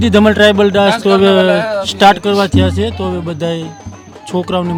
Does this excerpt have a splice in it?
no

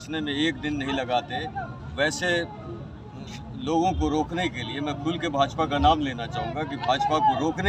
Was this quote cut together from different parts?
no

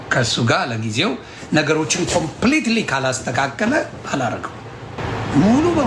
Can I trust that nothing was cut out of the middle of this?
yes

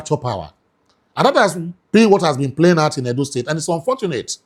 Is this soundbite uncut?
yes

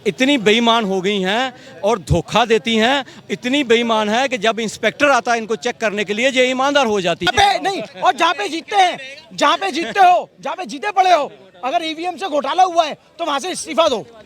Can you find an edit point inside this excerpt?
yes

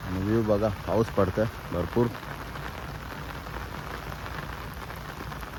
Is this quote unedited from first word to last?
yes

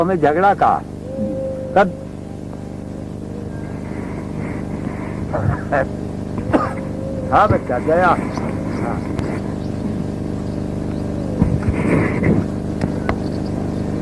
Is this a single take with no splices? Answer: yes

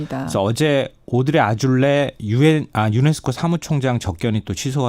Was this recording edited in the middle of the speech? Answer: yes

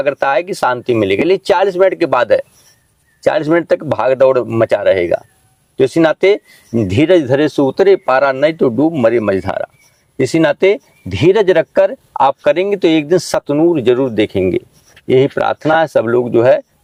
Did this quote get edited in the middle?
no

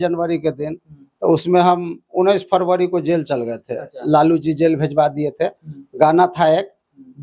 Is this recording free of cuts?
yes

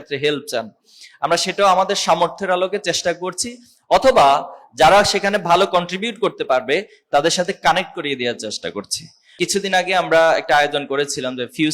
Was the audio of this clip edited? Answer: yes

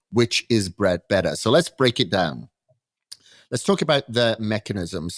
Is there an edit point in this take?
no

